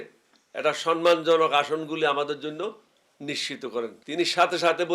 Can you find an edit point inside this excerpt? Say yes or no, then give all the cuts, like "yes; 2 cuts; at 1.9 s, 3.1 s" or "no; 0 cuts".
yes; 1 cut; at 4.0 s